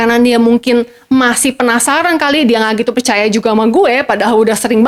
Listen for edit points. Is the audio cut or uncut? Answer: uncut